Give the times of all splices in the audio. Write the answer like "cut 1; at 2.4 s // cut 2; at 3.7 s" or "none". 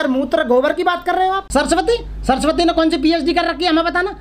cut 1; at 1.4 s